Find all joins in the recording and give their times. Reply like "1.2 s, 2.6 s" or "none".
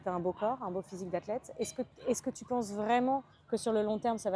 none